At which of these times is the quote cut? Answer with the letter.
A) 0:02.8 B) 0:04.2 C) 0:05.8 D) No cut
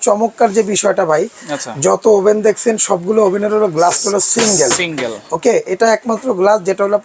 D